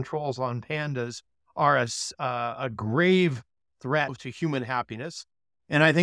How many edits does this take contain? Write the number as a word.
two